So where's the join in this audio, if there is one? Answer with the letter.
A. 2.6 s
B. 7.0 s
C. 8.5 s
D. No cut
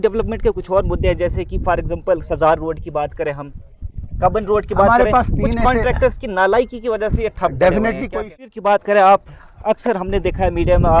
C